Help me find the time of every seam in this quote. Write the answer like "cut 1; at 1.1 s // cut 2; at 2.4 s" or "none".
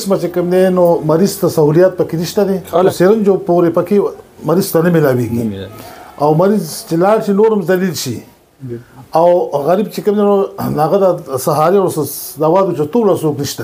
cut 1; at 2.9 s